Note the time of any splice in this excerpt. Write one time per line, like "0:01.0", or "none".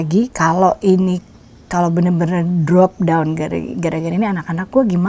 none